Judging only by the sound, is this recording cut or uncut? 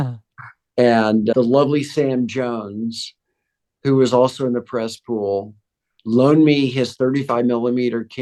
uncut